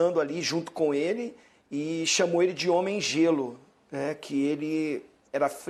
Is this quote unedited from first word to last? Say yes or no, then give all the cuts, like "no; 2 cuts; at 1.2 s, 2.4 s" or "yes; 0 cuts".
yes; 0 cuts